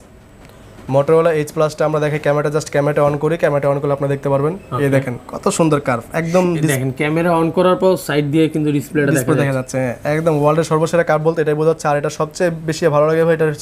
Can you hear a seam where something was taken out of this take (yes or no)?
no